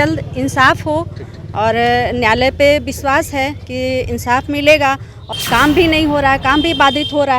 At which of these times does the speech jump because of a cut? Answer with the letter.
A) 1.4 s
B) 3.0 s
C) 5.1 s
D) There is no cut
C